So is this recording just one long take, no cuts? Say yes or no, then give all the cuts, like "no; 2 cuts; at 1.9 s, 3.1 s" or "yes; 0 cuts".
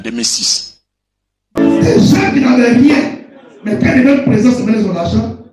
no; 1 cut; at 1.5 s